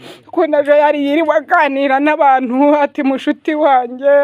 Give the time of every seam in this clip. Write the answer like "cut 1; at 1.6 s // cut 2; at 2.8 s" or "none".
none